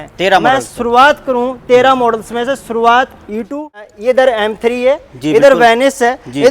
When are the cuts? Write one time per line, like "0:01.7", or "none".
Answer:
0:03.9